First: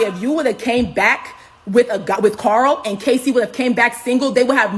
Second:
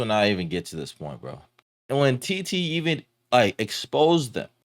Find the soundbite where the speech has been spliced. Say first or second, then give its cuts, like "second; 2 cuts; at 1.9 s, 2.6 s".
second; 1 cut; at 1.6 s